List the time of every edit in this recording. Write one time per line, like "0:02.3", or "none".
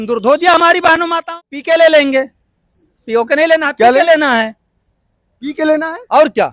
0:01.2